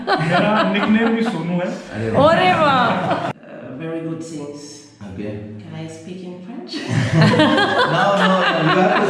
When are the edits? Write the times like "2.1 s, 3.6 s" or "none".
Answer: 3.3 s